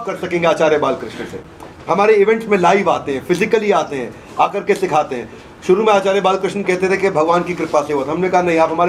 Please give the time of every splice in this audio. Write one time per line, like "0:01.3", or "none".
none